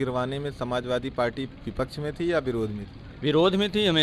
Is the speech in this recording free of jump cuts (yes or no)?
yes